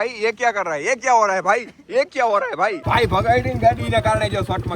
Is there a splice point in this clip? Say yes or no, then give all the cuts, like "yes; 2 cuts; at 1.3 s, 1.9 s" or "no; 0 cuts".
yes; 1 cut; at 2.8 s